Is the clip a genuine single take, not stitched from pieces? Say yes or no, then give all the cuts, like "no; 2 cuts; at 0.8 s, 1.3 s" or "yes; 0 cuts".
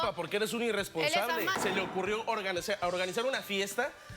no; 1 cut; at 1.5 s